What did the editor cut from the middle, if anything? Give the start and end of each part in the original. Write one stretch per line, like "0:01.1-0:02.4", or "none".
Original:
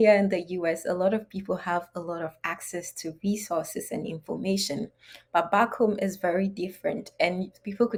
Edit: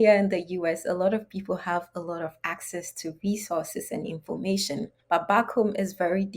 0:05.0-0:05.2

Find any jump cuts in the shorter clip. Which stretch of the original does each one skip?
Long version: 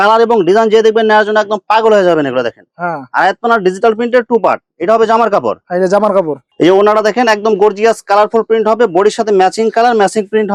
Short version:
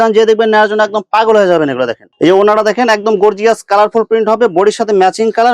0:02.6-0:06.4

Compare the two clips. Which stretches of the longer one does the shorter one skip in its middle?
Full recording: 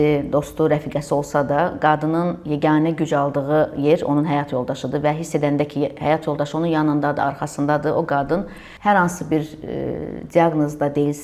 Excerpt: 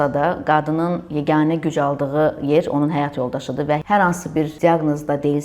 0:05.2-0:08.8
0:09.5-0:10.3

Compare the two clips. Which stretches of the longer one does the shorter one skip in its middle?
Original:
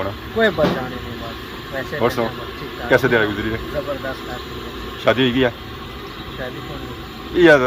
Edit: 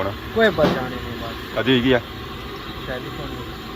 0:01.5-0:05.1

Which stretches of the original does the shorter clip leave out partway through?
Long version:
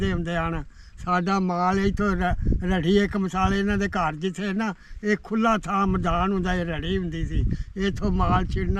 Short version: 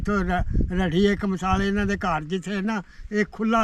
none

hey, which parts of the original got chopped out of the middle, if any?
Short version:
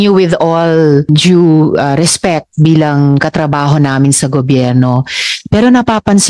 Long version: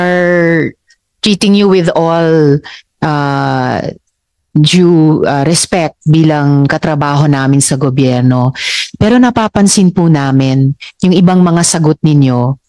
0:02.6-0:04.5

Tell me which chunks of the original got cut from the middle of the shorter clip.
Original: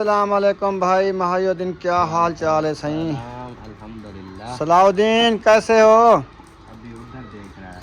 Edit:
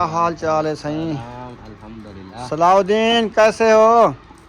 0:04.2-0:04.3

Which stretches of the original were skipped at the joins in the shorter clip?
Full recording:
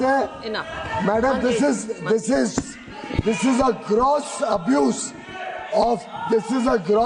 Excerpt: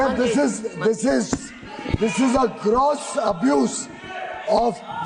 none

